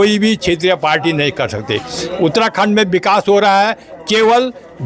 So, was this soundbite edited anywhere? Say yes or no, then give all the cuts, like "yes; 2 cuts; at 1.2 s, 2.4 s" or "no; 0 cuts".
no; 0 cuts